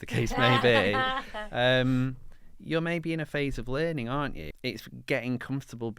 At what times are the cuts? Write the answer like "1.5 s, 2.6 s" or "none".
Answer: 4.4 s